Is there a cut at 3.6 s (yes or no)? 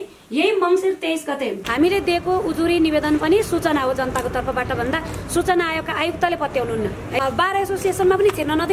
no